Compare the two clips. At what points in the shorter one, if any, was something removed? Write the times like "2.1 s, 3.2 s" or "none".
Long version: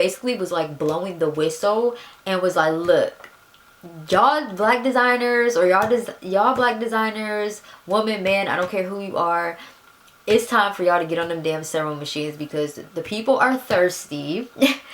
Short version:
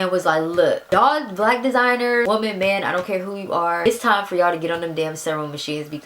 0.8 s, 2.2 s, 3.9 s